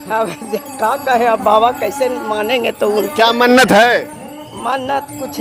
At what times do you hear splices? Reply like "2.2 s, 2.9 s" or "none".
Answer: none